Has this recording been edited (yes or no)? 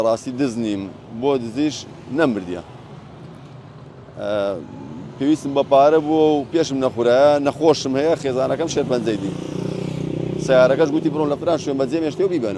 no